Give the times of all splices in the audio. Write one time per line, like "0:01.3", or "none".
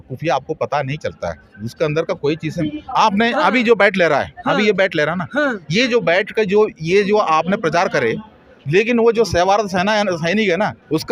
none